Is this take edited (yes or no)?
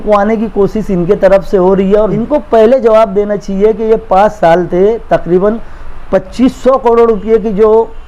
yes